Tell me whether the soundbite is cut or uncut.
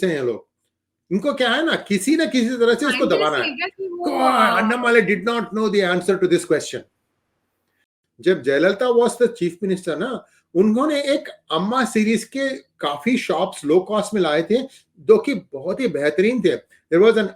cut